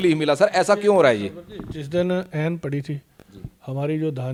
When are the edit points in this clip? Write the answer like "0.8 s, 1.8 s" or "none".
none